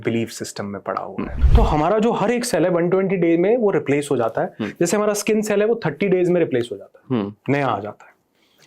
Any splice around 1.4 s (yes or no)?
yes